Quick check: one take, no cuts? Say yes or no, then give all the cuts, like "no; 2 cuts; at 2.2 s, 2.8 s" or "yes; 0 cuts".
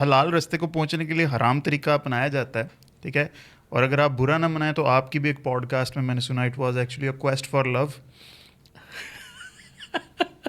yes; 0 cuts